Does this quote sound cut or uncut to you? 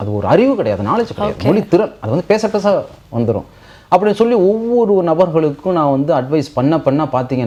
uncut